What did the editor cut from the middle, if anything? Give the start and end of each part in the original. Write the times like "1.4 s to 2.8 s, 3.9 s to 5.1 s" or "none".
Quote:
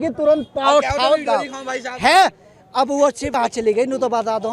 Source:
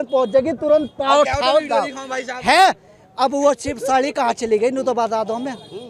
3.7 s to 4.1 s